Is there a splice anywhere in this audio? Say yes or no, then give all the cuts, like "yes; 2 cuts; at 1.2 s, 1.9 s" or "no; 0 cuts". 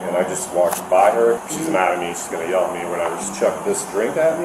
yes; 2 cuts; at 1.4 s, 3.2 s